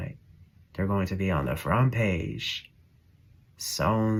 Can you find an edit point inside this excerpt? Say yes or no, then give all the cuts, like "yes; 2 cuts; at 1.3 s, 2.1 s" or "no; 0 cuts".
no; 0 cuts